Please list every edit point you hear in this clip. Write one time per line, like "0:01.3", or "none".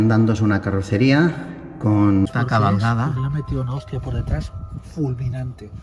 0:02.3